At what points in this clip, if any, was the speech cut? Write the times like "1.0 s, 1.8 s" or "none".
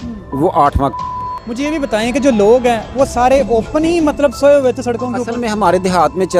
1.0 s